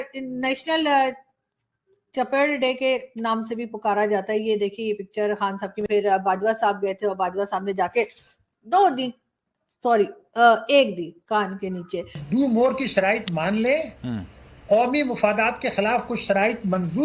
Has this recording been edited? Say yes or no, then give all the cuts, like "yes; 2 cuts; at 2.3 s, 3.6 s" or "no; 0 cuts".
yes; 2 cuts; at 5.9 s, 12.2 s